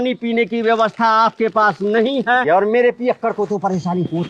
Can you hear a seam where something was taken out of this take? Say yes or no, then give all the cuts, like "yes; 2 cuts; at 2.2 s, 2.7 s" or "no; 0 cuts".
yes; 1 cut; at 2.4 s